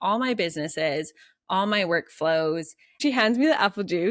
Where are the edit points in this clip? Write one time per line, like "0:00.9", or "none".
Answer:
0:03.0